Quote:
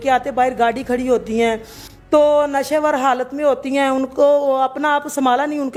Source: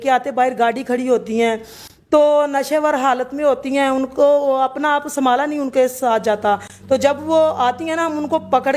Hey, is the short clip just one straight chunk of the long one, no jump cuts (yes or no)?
yes